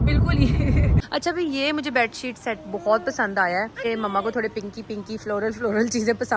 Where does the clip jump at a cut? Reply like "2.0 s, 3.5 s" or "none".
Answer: 1.0 s, 3.9 s